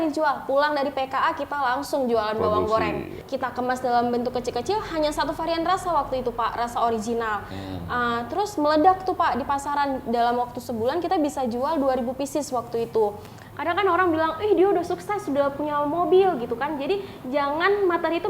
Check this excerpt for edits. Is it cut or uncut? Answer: cut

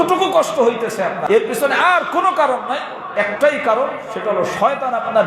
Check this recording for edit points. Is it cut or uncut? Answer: cut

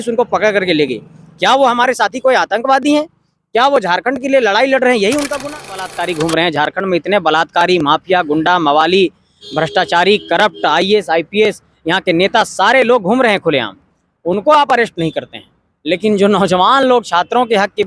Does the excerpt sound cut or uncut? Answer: cut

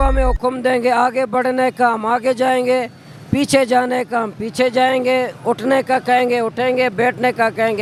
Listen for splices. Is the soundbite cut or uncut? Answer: uncut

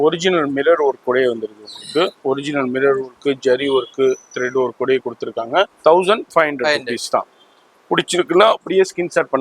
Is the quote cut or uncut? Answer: cut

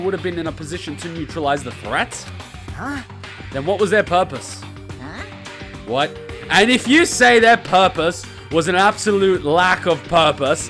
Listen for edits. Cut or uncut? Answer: uncut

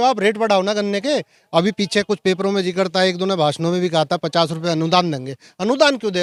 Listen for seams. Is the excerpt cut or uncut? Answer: uncut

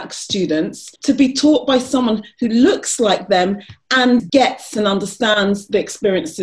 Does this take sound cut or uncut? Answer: cut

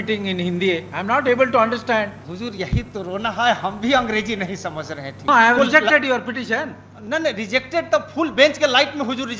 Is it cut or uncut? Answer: cut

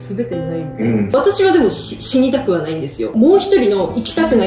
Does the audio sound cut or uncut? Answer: cut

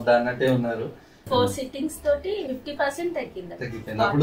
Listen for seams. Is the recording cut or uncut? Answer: cut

